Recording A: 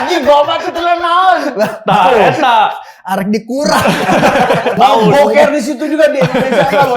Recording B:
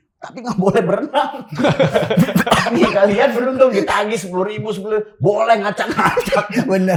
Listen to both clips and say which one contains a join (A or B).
A